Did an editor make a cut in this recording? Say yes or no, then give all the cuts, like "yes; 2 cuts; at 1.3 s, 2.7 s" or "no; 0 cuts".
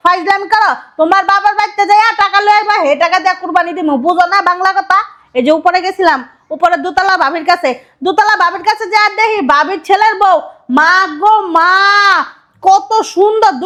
no; 0 cuts